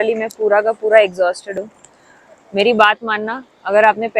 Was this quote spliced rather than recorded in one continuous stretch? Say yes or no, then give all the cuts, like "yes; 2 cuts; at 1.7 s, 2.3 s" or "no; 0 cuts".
no; 0 cuts